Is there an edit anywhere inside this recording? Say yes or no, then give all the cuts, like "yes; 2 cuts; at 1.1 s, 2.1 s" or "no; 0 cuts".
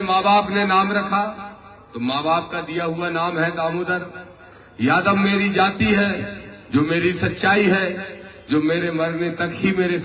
no; 0 cuts